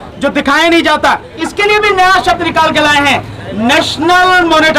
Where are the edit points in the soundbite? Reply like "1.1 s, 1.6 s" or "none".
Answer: 1.4 s